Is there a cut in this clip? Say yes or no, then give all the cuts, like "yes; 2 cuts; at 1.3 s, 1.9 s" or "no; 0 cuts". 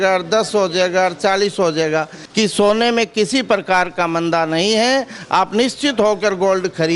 yes; 1 cut; at 2.2 s